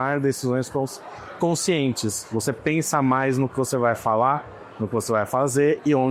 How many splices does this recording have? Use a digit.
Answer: 0